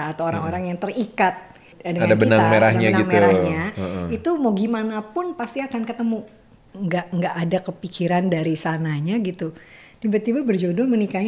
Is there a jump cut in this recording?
yes; 2 cuts; at 1.7 s, 6.6 s

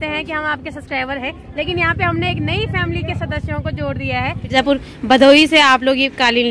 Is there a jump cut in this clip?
yes; 1 cut; at 4.5 s

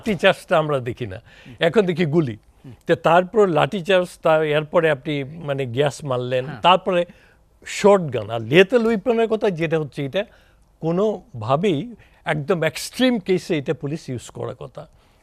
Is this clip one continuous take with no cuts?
yes; 0 cuts

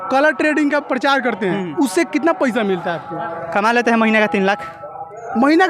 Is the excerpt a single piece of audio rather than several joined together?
yes; 0 cuts

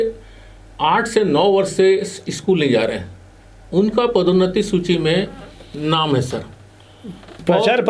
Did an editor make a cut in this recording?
no; 0 cuts

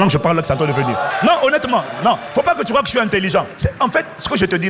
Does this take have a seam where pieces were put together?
yes; 3 cuts; at 1.1 s, 2.2 s, 3.6 s

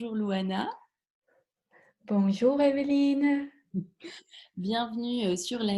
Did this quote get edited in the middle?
no; 0 cuts

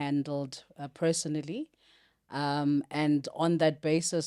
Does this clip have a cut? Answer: no; 0 cuts

